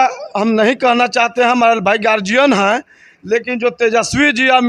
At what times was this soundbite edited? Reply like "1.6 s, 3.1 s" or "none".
none